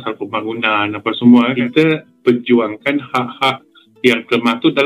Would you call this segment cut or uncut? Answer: cut